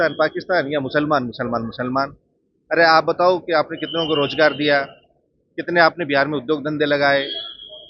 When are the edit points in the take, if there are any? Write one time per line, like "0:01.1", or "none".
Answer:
none